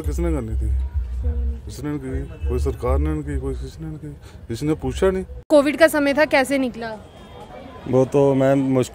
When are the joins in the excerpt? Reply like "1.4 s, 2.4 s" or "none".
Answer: 5.5 s